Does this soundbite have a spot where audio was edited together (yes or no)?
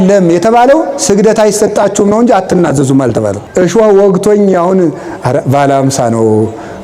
yes